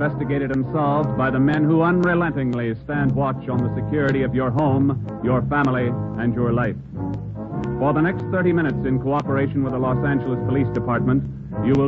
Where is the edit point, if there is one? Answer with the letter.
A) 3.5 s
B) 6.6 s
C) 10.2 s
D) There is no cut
C